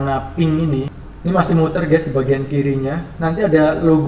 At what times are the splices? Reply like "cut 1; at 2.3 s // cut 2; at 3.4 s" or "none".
cut 1; at 1.0 s